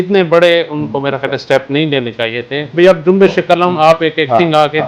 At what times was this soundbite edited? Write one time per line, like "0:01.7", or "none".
0:02.7